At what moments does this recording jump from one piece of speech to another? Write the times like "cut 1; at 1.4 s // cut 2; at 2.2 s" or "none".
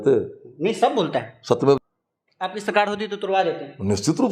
cut 1; at 1.8 s